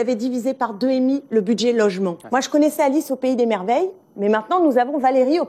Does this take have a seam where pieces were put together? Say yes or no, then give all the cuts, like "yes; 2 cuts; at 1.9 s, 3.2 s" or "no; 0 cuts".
yes; 1 cut; at 2.2 s